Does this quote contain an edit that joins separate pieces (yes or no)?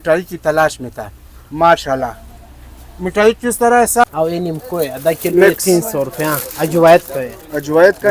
yes